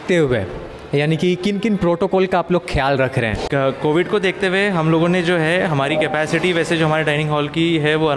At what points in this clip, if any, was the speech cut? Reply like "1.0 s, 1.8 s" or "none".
none